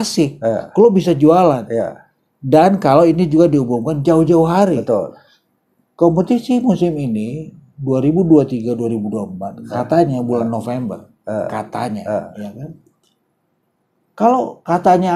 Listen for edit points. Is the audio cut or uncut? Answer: uncut